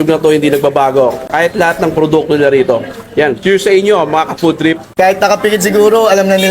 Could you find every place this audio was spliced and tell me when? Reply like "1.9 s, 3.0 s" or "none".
4.8 s